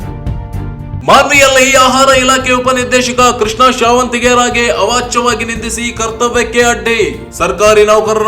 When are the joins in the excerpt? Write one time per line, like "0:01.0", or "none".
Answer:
0:01.0